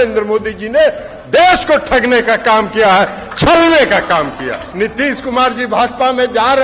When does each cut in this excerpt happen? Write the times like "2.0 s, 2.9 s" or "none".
4.6 s